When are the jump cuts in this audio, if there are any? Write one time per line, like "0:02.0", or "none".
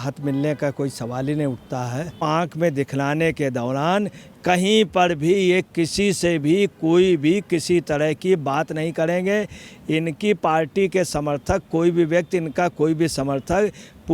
0:02.2